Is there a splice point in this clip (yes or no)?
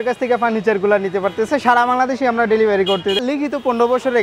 yes